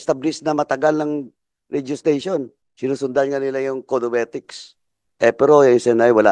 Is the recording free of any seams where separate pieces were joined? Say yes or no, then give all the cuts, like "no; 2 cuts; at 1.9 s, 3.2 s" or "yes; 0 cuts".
no; 1 cut; at 2.6 s